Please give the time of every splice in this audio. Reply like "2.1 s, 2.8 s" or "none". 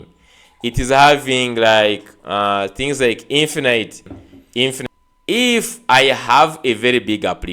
4.8 s